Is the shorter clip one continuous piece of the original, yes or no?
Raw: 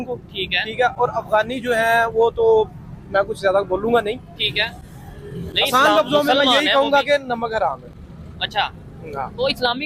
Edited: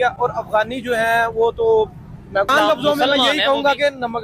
no